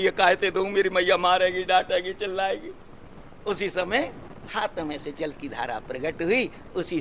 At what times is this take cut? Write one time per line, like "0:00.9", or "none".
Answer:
none